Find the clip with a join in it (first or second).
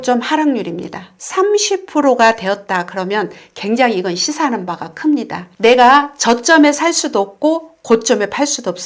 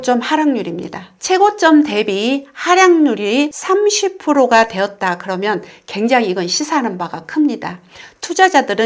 first